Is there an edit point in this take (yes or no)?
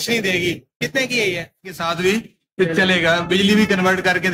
yes